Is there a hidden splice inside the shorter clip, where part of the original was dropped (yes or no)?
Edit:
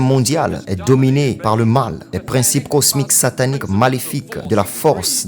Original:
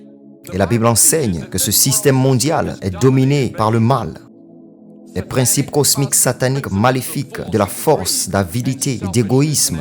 yes